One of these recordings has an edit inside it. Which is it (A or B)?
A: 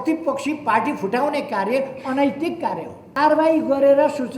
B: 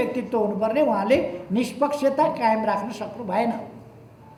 A